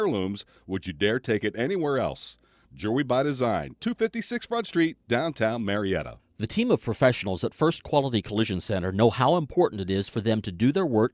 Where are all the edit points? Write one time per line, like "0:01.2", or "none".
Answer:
0:06.0